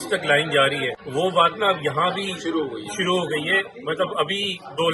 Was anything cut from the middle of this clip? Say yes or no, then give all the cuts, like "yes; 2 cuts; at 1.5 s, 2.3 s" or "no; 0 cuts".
no; 0 cuts